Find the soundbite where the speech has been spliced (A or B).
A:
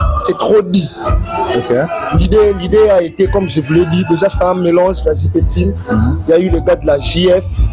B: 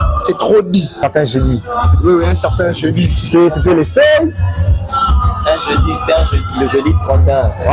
B